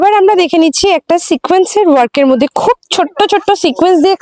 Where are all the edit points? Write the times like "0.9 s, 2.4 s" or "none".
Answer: none